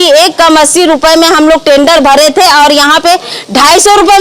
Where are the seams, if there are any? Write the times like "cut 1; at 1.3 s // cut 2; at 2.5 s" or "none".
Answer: none